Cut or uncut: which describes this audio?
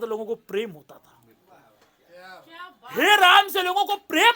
uncut